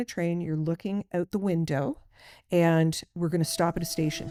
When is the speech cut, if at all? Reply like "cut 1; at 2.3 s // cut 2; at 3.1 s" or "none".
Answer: none